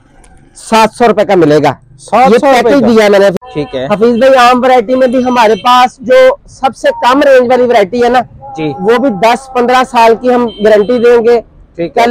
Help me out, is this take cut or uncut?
cut